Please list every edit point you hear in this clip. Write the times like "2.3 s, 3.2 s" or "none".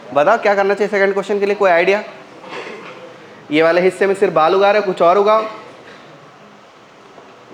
none